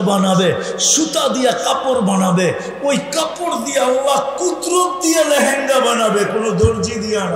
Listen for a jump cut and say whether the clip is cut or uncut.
uncut